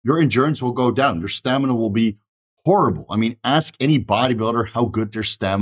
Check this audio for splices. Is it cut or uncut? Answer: uncut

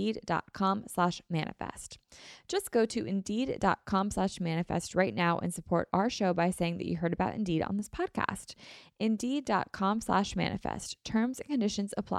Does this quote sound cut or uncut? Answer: uncut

